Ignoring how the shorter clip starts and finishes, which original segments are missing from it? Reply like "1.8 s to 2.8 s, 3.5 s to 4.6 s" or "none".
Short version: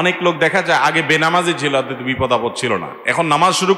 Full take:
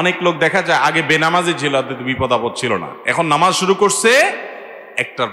none